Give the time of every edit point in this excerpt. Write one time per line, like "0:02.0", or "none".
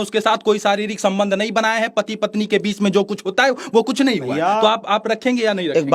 none